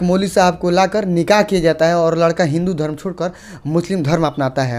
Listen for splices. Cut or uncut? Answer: uncut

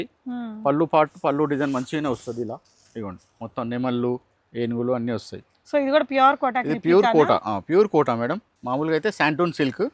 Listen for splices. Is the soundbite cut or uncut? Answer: cut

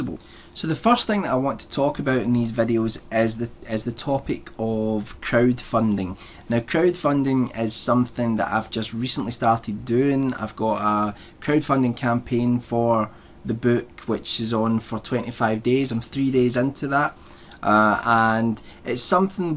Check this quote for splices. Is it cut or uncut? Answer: cut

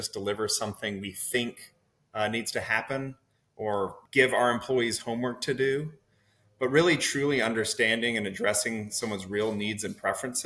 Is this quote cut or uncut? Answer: uncut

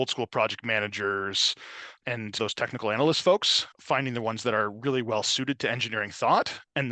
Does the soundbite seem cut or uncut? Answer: uncut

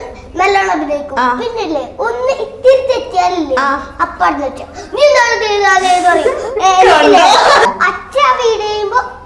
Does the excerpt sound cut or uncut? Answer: cut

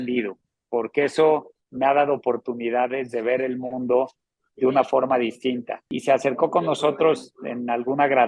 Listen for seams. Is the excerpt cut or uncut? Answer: cut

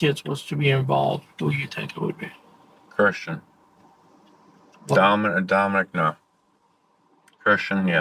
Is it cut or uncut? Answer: uncut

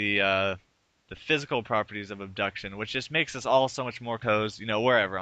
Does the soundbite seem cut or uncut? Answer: uncut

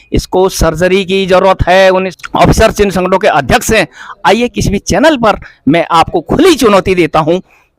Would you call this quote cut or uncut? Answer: cut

